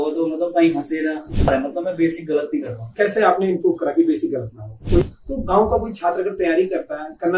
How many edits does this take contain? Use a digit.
2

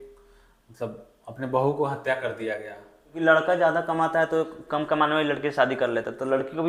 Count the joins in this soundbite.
1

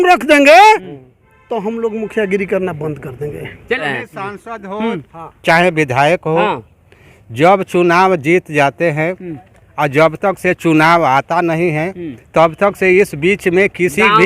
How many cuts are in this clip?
1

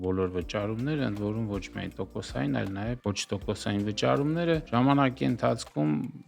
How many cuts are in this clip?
2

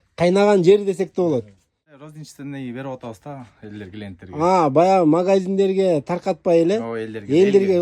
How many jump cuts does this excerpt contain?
1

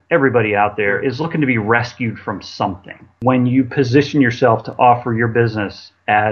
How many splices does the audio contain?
2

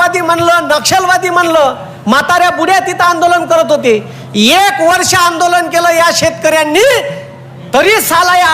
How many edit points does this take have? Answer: 0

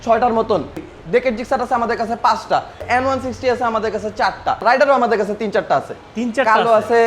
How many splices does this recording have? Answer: 3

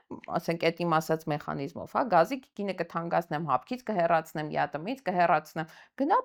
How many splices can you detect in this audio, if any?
0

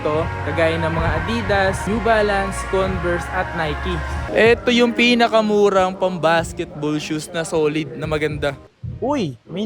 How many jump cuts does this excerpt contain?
2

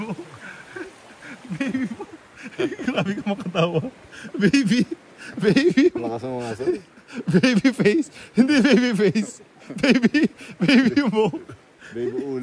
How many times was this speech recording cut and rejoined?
0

